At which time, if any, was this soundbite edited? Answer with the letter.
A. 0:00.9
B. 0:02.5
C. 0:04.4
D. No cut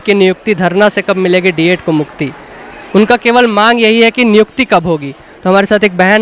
D